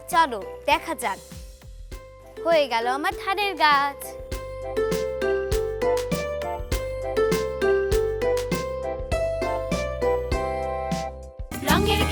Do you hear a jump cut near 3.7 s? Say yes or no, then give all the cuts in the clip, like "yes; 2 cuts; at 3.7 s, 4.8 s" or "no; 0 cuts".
no; 0 cuts